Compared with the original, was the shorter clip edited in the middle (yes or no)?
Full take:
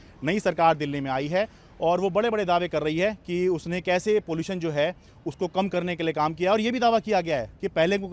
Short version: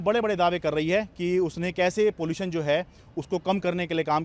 no